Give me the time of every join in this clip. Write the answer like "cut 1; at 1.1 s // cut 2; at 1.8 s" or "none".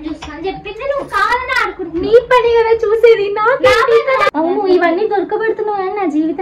cut 1; at 4.3 s